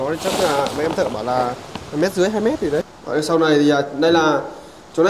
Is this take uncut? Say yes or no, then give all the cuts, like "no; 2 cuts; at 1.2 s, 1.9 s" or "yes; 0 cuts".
no; 1 cut; at 3.0 s